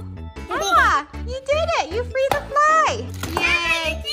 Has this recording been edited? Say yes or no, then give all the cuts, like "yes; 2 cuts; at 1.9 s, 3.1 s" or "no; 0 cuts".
yes; 1 cut; at 3.1 s